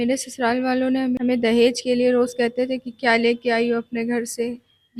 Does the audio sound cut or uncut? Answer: cut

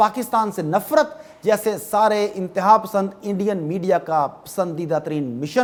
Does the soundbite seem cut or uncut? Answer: uncut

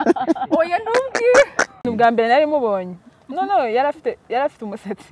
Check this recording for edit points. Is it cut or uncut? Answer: cut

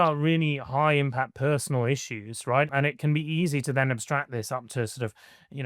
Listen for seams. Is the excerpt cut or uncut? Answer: cut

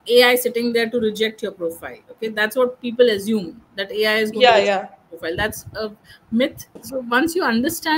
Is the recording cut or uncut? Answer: cut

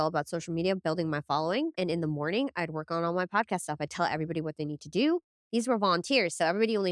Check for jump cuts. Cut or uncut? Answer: cut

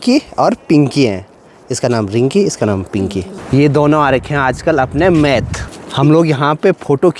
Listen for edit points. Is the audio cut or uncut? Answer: uncut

